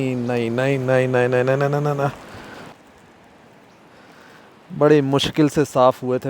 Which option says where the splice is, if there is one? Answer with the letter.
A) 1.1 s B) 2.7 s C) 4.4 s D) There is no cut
B